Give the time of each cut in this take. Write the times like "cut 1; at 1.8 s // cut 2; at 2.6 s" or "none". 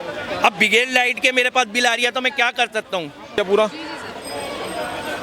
cut 1; at 3.4 s